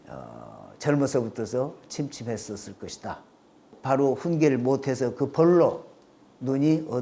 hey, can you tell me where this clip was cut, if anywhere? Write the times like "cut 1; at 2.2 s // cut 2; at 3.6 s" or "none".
cut 1; at 3.7 s